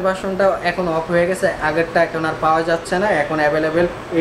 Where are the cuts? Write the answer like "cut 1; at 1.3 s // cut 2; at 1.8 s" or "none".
none